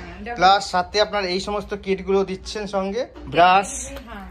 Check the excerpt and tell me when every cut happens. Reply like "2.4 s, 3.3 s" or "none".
3.2 s